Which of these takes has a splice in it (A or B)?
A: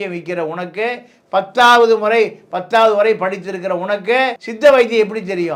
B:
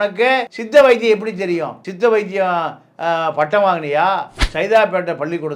B